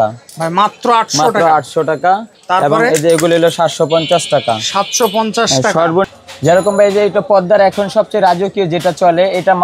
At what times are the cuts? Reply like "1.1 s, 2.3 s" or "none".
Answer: 6.1 s